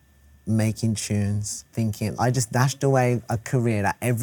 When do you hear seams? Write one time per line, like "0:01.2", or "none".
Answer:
0:02.1